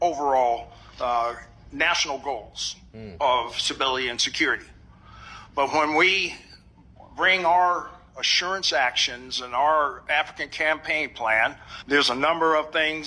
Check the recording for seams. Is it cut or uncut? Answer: uncut